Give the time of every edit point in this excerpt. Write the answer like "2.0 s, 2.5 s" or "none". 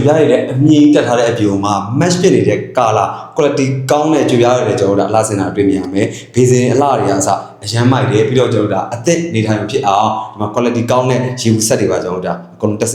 none